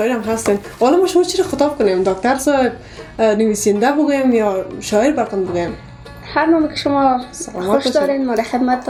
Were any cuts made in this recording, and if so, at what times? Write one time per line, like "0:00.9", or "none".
none